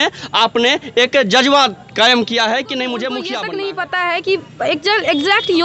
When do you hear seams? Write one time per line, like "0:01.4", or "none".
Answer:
0:03.4